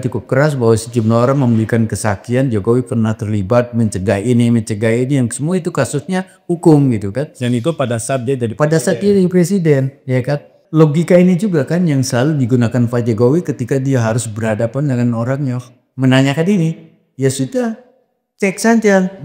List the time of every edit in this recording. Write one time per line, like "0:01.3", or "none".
0:10.6